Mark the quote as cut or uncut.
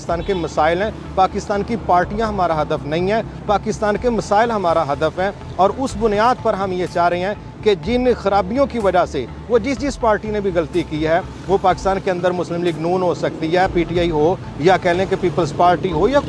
uncut